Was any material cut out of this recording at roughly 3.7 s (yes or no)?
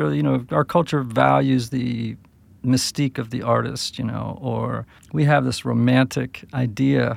no